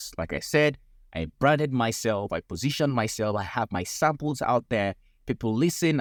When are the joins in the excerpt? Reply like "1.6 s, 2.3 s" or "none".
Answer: none